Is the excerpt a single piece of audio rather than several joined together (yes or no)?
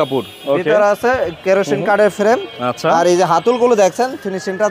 yes